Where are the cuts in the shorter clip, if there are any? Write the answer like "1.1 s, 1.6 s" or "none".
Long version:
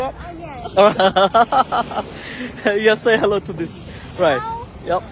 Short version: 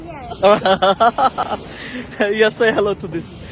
1.4 s